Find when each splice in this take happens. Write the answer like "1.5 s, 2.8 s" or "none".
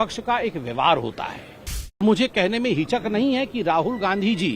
2.0 s